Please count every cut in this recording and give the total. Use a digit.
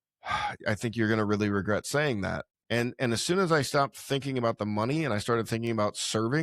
1